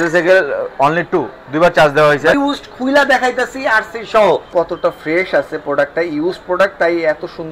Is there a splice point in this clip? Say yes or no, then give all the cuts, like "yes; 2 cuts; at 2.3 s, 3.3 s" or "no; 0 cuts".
yes; 2 cuts; at 2.3 s, 4.5 s